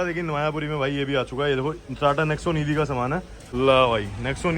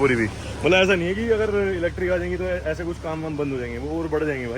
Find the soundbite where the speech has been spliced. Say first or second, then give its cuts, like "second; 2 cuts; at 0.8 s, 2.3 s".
first; 1 cut; at 3.4 s